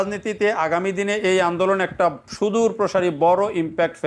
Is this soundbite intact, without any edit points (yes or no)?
yes